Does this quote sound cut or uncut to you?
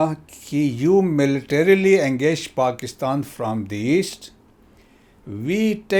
uncut